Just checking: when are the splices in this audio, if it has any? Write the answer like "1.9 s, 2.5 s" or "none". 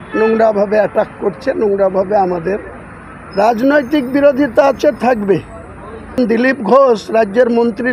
6.2 s